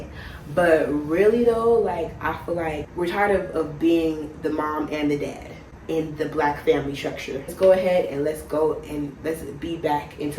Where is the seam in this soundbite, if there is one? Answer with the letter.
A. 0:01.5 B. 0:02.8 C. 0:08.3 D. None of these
B